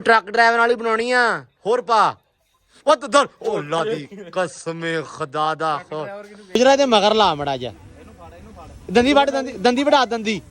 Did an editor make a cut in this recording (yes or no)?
yes